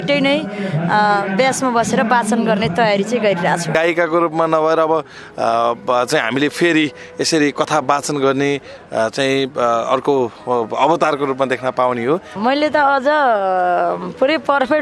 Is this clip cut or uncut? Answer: cut